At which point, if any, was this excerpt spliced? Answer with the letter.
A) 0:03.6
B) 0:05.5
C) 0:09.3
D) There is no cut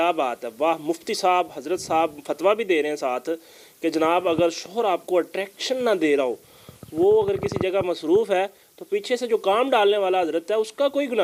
D